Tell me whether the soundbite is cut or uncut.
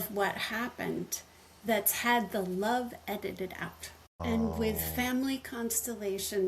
cut